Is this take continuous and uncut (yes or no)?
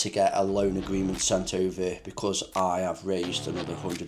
yes